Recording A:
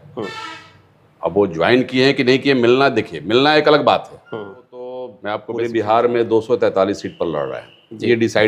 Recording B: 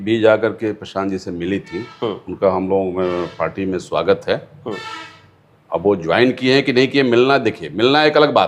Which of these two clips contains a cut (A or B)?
A